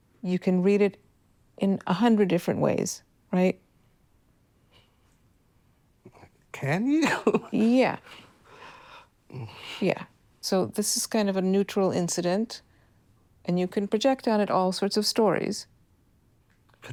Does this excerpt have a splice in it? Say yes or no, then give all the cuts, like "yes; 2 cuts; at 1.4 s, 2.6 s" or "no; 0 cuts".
no; 0 cuts